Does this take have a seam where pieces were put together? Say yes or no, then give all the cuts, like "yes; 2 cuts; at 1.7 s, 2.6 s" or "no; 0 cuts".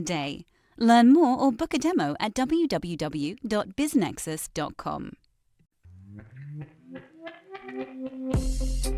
yes; 1 cut; at 5.6 s